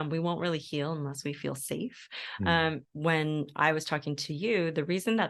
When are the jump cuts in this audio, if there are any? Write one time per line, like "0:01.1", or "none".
0:02.8